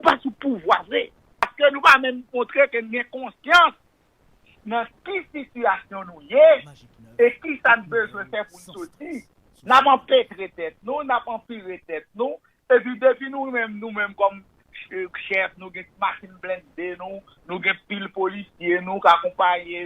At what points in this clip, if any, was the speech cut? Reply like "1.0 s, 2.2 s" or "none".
1.5 s